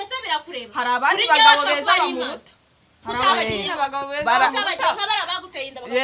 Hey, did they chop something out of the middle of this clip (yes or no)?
no